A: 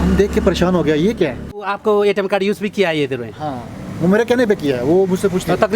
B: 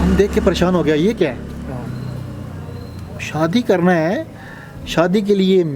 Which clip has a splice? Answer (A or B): A